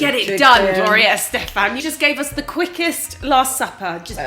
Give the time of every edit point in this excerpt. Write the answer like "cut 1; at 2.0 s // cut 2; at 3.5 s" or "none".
cut 1; at 1.8 s